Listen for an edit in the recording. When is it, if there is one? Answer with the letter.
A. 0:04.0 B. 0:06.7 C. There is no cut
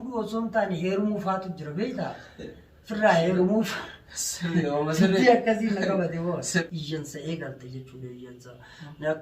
B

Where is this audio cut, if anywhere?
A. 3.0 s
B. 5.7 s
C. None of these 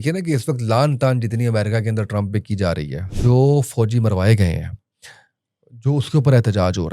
A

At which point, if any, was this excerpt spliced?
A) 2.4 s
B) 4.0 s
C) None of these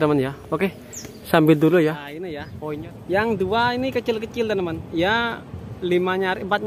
A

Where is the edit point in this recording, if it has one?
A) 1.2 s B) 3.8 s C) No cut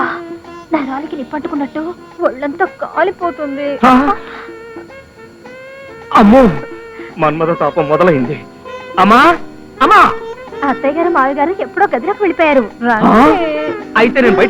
C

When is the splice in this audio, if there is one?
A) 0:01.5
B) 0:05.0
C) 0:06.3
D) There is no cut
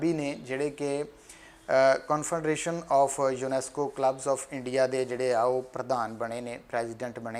D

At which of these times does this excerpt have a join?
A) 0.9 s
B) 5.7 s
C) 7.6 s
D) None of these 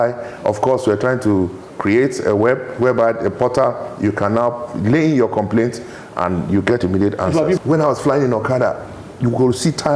C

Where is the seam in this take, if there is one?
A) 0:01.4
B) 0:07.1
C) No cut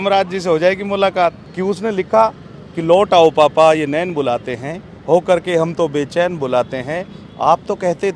A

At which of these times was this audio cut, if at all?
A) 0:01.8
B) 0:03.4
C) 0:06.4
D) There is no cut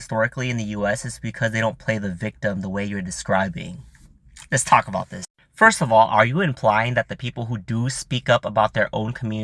D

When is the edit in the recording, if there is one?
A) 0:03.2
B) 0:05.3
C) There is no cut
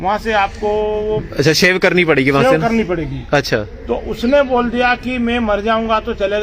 C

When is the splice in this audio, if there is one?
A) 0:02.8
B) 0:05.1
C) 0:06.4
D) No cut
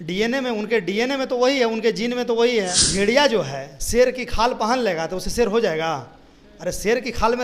A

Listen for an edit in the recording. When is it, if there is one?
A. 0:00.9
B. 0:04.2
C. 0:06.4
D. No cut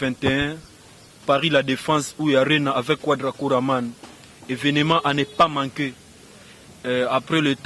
D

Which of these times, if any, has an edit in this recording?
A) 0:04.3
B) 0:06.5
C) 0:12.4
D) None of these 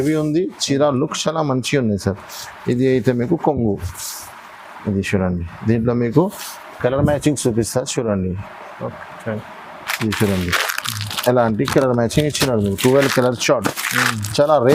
D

